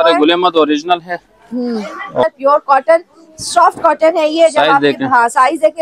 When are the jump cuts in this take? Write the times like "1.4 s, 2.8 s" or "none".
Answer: 2.2 s